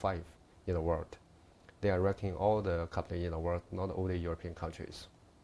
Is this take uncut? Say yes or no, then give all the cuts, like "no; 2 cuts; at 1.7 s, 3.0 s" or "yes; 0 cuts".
yes; 0 cuts